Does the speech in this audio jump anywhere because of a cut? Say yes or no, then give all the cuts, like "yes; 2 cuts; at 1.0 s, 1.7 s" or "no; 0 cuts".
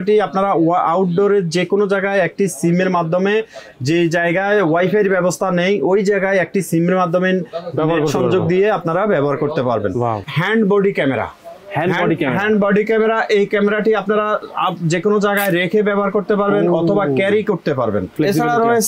yes; 2 cuts; at 10.3 s, 18.1 s